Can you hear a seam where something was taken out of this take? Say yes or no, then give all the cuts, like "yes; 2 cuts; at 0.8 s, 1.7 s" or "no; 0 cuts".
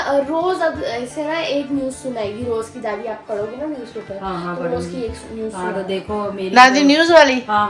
no; 0 cuts